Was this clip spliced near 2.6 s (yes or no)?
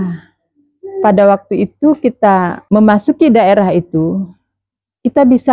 yes